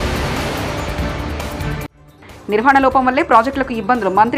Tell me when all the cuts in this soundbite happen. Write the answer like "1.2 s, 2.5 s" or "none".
2.0 s